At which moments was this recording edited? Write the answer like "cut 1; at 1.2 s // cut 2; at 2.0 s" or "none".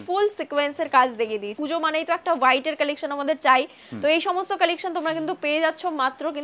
cut 1; at 1.5 s